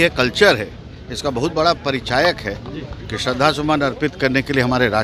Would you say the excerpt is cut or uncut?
uncut